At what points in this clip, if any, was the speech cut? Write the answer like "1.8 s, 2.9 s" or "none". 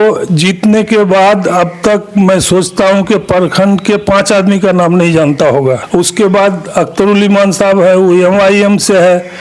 5.8 s